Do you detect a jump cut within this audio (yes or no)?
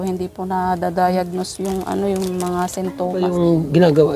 yes